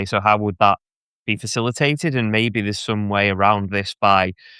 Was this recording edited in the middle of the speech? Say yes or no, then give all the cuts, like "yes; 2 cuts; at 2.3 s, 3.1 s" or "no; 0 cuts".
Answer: no; 0 cuts